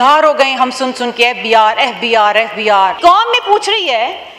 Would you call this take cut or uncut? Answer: cut